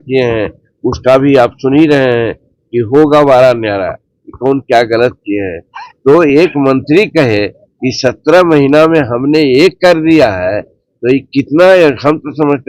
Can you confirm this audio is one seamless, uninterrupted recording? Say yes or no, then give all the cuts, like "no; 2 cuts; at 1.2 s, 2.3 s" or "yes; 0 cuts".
yes; 0 cuts